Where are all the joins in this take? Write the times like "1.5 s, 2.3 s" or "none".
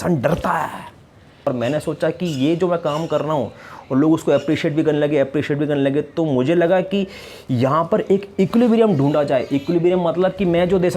1.5 s

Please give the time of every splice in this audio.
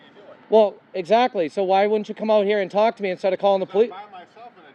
none

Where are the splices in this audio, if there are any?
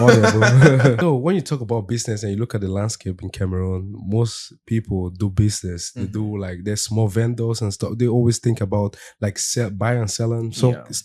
1.0 s

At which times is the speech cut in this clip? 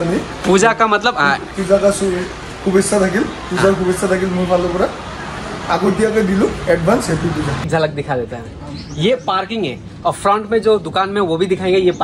7.7 s

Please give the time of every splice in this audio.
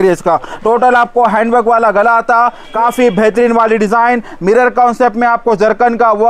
2.6 s

